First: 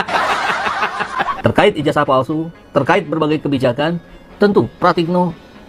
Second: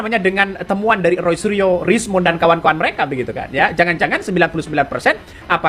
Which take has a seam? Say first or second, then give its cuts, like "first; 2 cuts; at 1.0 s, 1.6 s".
first; 1 cut; at 1.1 s